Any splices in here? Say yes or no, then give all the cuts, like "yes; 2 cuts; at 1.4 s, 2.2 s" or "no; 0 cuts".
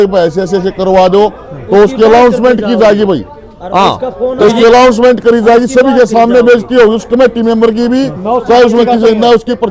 no; 0 cuts